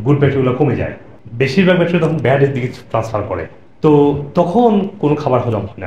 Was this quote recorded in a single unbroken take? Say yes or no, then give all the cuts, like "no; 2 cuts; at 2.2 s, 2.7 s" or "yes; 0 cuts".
yes; 0 cuts